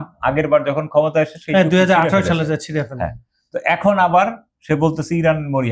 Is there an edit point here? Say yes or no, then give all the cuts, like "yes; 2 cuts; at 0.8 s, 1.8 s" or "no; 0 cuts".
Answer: no; 0 cuts